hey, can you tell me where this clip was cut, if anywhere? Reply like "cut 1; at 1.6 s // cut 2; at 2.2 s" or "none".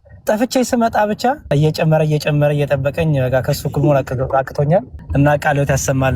cut 1; at 1.4 s // cut 2; at 5.0 s

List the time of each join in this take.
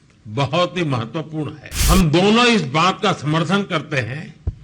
cut 1; at 1.7 s

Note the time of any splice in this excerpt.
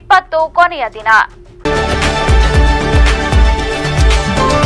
cut 1; at 1.4 s

